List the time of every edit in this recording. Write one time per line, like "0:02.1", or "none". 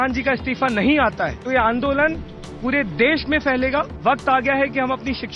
0:01.4
0:03.9